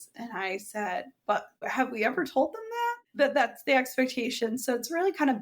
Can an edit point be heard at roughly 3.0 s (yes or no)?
yes